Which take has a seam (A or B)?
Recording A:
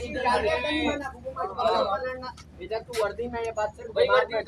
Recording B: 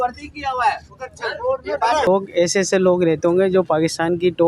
B